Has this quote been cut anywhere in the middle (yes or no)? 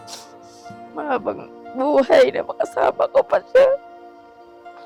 no